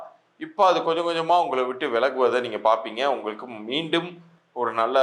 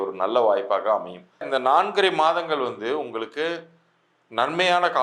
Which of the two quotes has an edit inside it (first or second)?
second